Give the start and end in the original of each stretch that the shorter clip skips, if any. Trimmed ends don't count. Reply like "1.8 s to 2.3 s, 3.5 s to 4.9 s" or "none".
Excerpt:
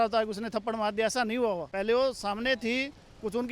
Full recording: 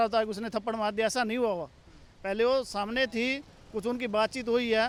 1.7 s to 2.2 s